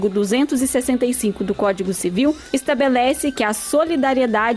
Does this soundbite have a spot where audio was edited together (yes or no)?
yes